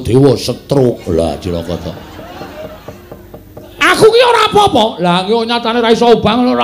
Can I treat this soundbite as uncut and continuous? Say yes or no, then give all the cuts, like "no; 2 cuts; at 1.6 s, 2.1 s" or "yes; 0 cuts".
yes; 0 cuts